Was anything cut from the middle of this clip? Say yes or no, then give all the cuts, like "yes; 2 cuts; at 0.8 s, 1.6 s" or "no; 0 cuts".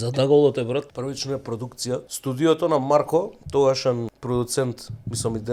yes; 3 cuts; at 0.9 s, 2.1 s, 4.1 s